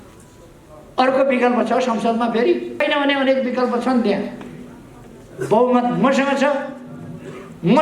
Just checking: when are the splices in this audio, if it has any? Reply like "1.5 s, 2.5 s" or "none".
2.8 s